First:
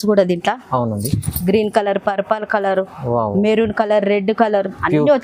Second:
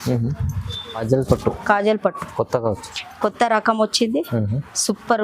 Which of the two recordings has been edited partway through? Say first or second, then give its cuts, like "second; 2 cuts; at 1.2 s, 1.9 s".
second; 1 cut; at 1.0 s